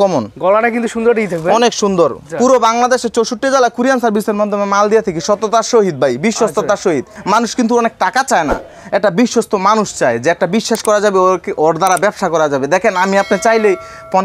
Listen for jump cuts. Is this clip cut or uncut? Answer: cut